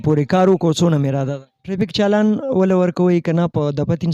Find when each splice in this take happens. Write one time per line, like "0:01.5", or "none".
0:01.7